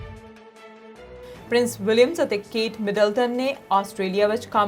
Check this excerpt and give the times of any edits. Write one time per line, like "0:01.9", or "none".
none